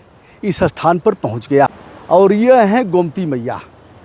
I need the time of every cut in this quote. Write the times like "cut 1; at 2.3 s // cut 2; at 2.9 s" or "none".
cut 1; at 1.7 s